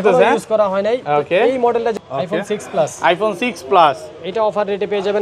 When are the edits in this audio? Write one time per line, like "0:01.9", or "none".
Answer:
0:01.9